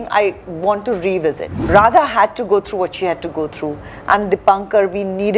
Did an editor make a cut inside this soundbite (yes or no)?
yes